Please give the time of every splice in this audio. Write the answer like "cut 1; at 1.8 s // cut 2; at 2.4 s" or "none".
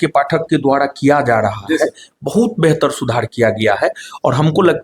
none